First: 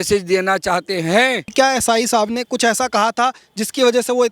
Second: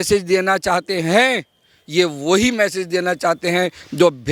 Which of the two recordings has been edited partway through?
first; 1 cut; at 1.5 s

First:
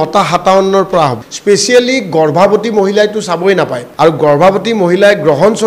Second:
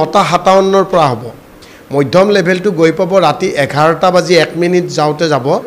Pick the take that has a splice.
first; 2 cuts; at 1.3 s, 3.8 s

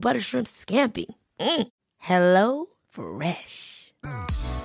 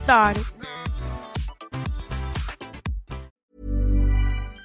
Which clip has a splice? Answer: second; 1 cut; at 3.4 s

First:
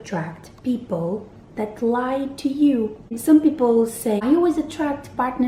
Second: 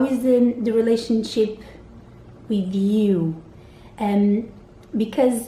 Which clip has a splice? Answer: first; 2 cuts; at 3.2 s, 4.2 s

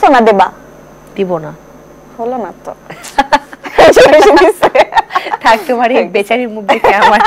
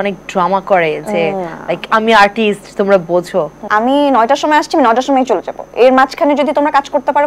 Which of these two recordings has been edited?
second; 1 cut; at 3.6 s

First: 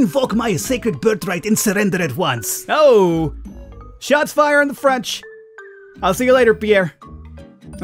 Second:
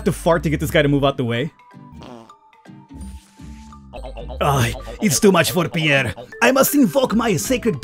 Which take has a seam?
second; 2 cuts; at 1.9 s, 4.0 s

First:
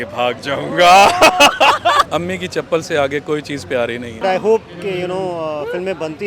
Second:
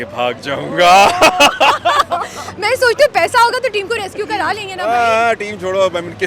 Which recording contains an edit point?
first; 2 cuts; at 2.1 s, 4.2 s

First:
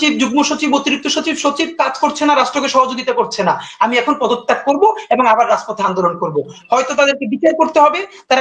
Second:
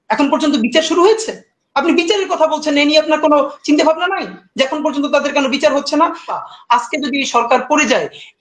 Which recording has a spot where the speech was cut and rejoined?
second; 1 cut; at 6.3 s

